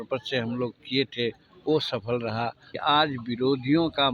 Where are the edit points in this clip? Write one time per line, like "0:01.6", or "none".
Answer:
0:02.8